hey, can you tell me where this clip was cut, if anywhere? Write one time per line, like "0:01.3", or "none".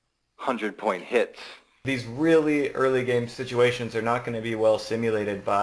0:01.8
0:03.4